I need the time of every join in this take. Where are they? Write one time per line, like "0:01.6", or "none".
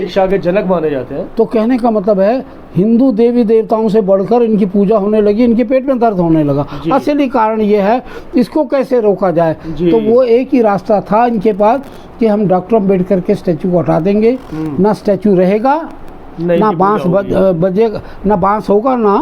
none